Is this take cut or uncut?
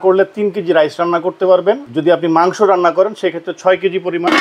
cut